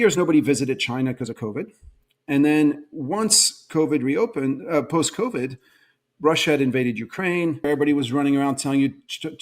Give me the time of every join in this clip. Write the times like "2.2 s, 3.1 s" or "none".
7.7 s